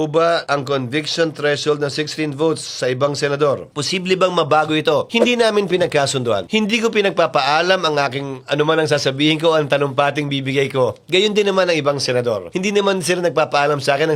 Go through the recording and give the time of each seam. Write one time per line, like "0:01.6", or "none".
none